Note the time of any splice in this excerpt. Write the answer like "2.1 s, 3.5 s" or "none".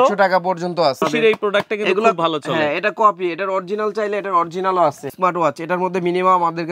1.0 s, 5.1 s